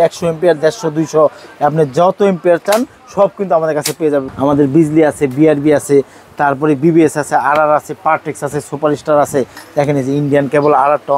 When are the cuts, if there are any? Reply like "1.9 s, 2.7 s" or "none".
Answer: 4.3 s